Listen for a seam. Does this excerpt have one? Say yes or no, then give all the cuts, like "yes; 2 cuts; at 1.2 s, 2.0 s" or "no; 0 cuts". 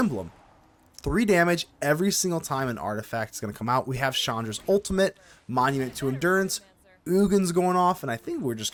no; 0 cuts